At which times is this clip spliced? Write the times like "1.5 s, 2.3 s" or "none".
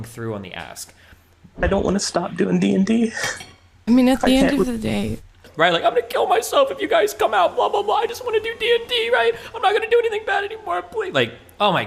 1.6 s, 5.4 s